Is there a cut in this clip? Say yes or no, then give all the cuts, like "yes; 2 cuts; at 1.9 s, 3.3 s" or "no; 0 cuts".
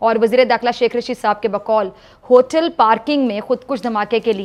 no; 0 cuts